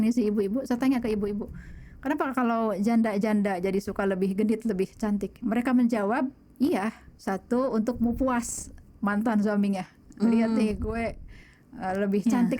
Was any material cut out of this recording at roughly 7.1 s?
yes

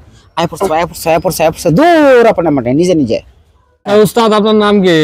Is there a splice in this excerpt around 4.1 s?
yes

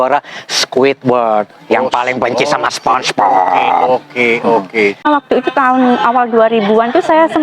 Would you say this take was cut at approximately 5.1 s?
yes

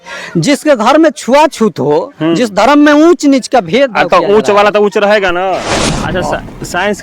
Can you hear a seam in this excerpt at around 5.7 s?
yes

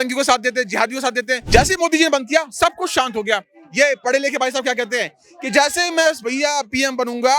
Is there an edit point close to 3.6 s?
no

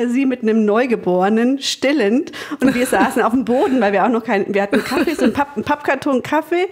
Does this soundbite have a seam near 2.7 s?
no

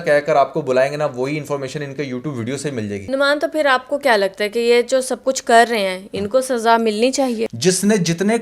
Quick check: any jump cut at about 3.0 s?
yes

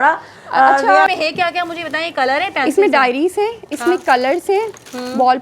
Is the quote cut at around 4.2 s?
no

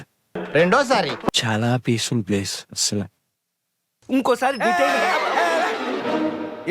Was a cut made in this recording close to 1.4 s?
yes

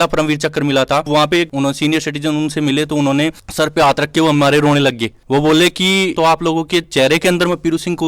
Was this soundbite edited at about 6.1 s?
yes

